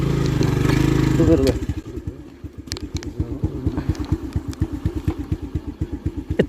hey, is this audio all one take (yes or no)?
yes